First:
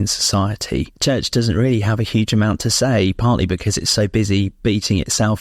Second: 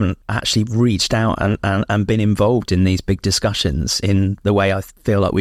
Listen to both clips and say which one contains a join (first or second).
first